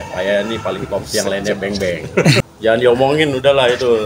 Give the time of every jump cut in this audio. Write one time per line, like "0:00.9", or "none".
0:02.4